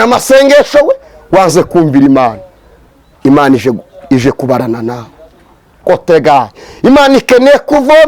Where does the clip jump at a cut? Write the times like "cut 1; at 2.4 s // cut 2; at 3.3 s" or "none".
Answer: cut 1; at 5.8 s